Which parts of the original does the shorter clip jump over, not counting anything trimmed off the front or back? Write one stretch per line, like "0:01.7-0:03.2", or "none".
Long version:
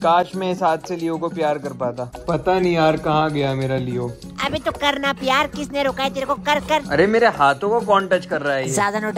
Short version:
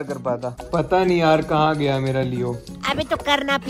none